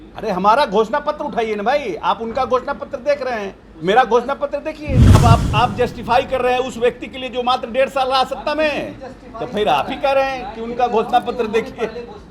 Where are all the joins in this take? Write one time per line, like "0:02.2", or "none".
0:05.2